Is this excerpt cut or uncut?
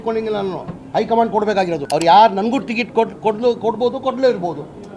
cut